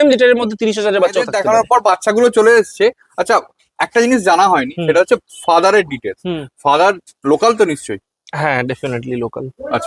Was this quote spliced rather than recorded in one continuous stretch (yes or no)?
no